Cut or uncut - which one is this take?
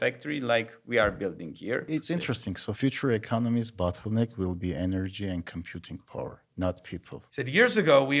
cut